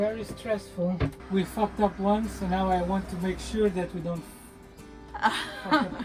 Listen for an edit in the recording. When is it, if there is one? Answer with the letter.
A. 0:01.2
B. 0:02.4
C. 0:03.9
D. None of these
A